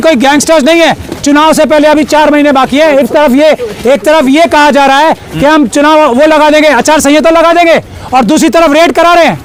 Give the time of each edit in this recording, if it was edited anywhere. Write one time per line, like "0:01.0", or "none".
none